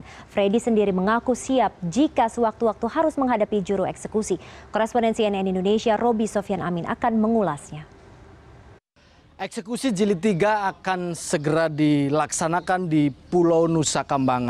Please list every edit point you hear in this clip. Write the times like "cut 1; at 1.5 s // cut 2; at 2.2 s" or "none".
none